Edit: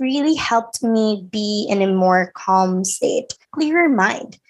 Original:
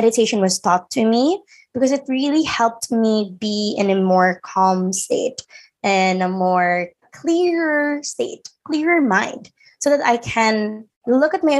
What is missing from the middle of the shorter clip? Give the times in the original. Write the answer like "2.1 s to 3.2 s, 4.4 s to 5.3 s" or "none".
5.5 s to 8.5 s